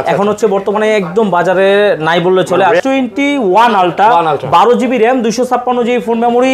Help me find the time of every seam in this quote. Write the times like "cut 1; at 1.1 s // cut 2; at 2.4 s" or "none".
cut 1; at 2.8 s